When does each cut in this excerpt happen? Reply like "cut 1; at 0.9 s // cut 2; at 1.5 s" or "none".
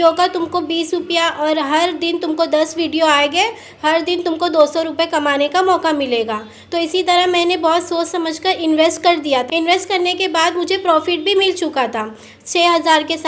cut 1; at 9.5 s